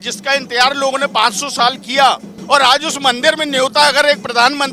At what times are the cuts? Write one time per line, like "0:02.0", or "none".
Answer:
0:02.3